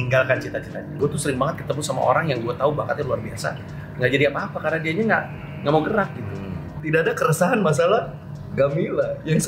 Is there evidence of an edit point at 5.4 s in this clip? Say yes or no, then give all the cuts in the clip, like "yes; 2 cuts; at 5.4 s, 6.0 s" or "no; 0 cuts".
no; 2 cuts; at 0.9 s, 6.7 s